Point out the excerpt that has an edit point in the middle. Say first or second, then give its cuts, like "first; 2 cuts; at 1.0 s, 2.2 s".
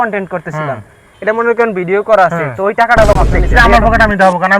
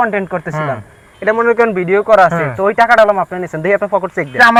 first; 1 cut; at 3.3 s